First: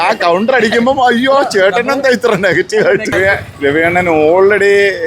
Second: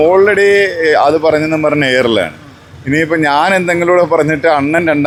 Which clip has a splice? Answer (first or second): first